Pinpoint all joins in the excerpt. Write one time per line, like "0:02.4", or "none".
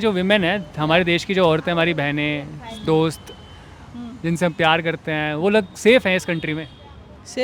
none